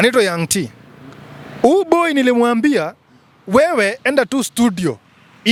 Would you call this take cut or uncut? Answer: uncut